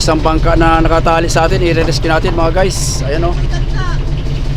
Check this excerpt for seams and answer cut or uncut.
uncut